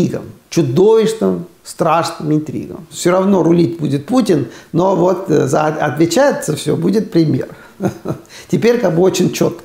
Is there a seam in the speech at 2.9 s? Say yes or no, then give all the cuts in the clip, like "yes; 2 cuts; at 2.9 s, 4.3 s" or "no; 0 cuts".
yes; 1 cut; at 2.9 s